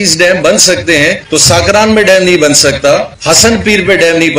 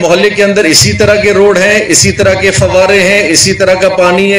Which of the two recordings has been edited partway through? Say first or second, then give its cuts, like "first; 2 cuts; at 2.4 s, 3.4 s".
first; 2 cuts; at 1.2 s, 3.1 s